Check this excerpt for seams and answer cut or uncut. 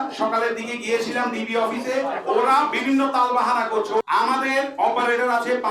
cut